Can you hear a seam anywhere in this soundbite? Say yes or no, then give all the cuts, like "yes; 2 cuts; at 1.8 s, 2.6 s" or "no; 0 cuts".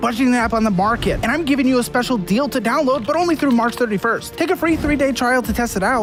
no; 0 cuts